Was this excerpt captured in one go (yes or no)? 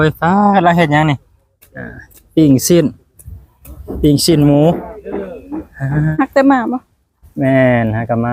no